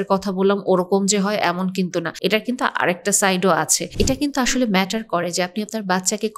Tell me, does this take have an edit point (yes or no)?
yes